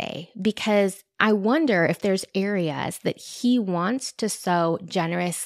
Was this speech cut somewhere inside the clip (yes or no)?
yes